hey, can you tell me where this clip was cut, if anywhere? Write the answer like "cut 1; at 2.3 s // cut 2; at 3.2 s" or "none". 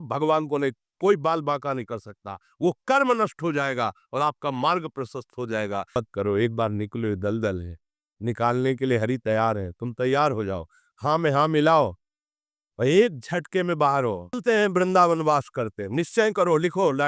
cut 1; at 6.0 s // cut 2; at 14.4 s